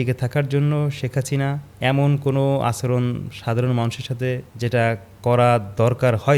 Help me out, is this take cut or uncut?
cut